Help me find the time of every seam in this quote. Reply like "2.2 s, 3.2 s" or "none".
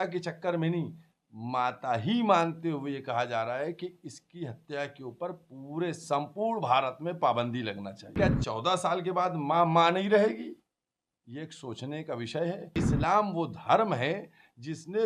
8.1 s, 12.8 s